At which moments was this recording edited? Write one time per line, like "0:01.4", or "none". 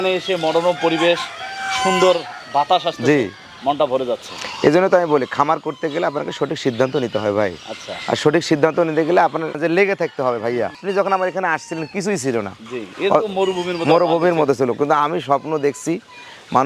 none